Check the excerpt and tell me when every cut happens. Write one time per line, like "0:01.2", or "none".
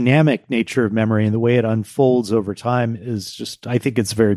none